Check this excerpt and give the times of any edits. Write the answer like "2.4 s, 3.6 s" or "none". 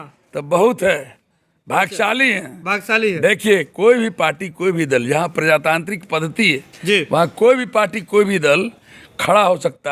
none